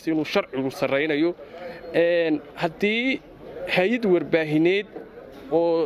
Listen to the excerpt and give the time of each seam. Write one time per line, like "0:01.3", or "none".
none